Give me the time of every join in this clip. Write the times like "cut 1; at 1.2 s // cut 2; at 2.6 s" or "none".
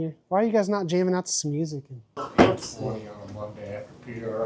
none